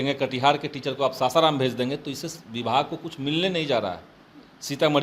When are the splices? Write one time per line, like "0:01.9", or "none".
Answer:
none